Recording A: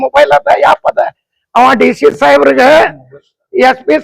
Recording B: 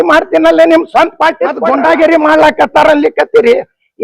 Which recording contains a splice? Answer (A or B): B